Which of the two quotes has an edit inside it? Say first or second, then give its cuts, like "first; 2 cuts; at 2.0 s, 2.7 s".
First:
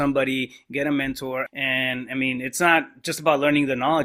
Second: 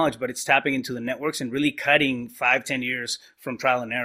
first; 1 cut; at 1.5 s